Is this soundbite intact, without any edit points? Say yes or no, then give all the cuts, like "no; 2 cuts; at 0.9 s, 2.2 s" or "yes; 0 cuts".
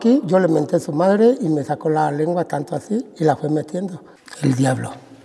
yes; 0 cuts